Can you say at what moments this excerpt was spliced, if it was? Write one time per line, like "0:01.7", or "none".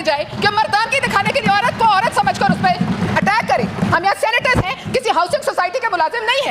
0:03.9